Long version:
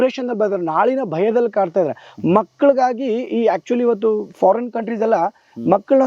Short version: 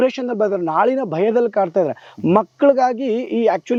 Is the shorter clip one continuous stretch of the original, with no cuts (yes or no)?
yes